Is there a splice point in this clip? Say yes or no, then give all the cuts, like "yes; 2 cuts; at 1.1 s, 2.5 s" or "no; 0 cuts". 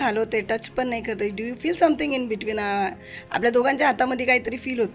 no; 0 cuts